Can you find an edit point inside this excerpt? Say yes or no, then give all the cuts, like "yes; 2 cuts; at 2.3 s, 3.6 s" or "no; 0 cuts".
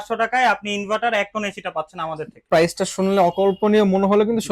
yes; 1 cut; at 2.4 s